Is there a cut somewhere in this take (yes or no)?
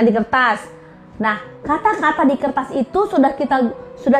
no